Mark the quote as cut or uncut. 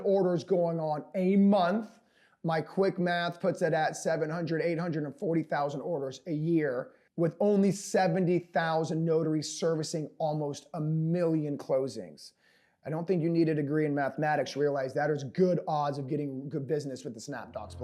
uncut